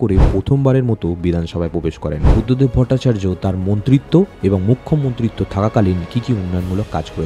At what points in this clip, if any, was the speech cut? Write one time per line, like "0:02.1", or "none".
0:02.3